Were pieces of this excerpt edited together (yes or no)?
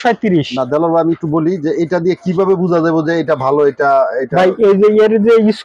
no